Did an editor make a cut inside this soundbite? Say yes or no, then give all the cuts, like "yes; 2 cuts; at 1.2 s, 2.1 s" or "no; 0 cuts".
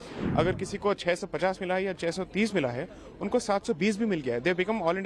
no; 0 cuts